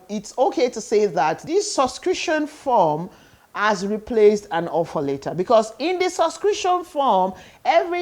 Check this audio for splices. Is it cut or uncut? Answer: cut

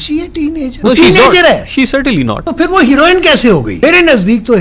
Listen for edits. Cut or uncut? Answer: cut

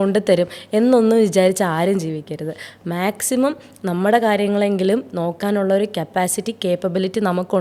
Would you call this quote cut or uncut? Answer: uncut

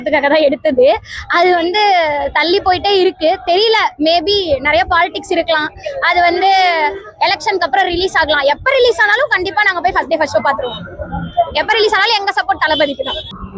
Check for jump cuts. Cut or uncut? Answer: uncut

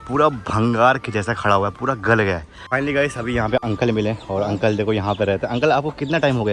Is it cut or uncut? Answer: uncut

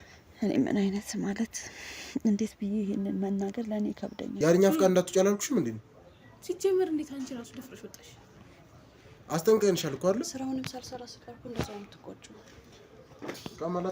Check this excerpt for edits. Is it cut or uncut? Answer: cut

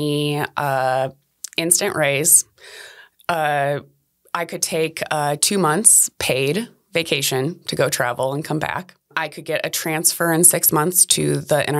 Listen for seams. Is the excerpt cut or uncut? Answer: cut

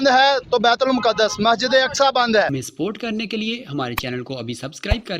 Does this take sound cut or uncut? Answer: cut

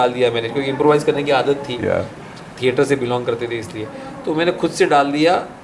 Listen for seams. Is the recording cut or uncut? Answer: uncut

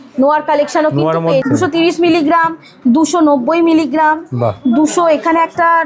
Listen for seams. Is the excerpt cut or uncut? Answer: cut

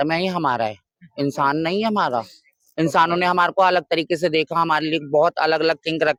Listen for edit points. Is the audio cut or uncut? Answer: uncut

